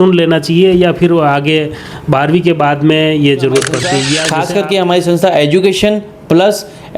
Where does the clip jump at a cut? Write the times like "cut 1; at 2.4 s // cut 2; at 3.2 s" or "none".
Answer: cut 1; at 4.2 s